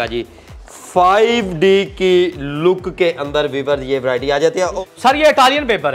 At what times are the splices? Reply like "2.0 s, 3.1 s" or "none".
4.7 s